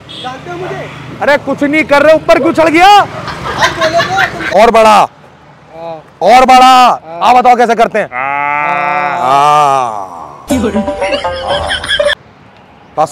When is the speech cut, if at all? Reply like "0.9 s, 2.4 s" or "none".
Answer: 4.4 s, 12.2 s